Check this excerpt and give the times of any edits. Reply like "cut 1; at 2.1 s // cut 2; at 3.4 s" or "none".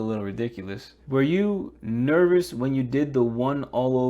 cut 1; at 0.9 s